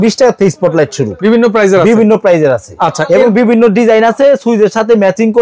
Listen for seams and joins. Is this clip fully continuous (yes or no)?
no